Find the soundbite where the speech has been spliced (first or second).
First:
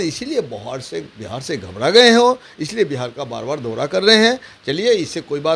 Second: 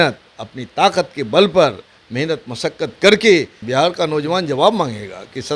second